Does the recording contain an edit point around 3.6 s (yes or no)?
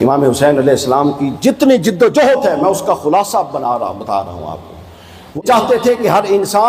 no